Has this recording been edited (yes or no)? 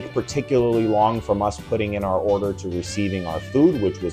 no